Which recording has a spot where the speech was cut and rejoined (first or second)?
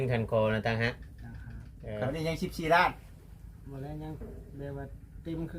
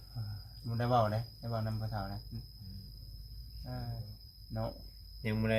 first